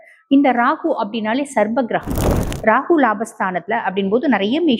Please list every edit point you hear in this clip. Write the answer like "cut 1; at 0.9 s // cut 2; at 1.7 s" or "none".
cut 1; at 2.4 s